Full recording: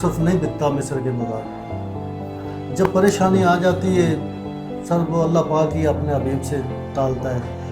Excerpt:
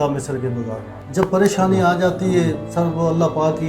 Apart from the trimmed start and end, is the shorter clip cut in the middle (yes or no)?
yes